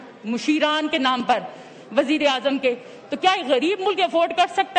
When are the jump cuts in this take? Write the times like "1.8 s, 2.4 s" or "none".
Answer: none